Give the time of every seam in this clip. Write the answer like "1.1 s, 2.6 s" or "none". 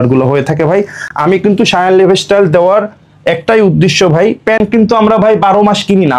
none